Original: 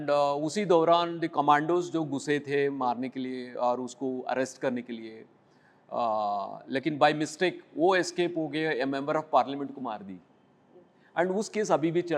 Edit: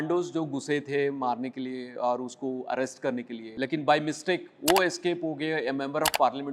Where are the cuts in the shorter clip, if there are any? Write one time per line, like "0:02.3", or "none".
0:03.5